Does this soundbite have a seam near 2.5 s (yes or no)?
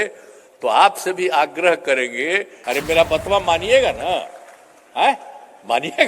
yes